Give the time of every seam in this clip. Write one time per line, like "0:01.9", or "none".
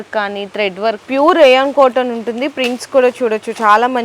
0:01.0